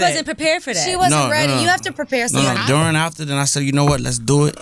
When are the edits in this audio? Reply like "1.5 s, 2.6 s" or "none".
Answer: 2.6 s